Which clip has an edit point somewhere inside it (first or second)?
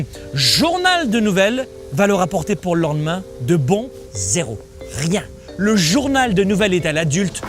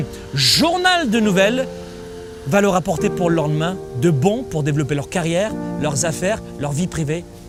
first